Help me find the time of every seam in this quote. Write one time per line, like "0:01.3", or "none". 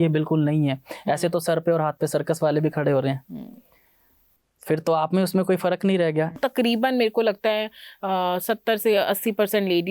0:06.4